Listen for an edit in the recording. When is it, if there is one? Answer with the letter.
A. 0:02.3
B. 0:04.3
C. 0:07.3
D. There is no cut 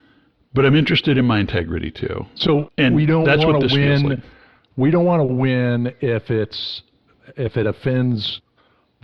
D